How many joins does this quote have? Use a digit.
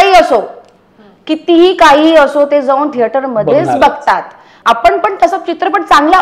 1